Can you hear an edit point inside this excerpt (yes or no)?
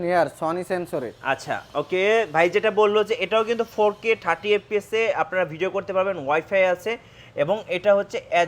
no